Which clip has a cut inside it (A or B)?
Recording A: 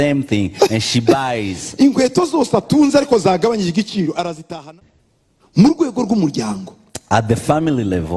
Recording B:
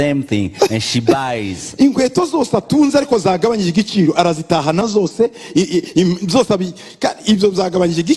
A